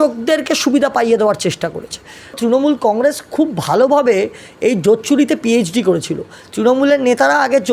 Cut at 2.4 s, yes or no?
yes